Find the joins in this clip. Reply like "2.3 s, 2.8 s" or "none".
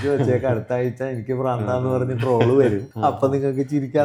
2.9 s